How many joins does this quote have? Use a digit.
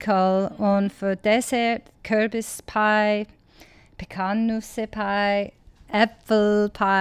1